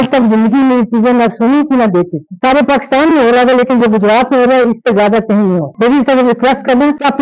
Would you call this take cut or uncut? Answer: uncut